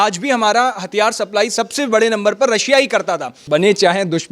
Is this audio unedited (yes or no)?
no